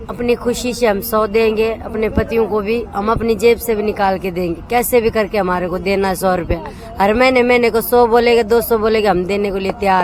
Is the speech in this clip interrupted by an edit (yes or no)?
no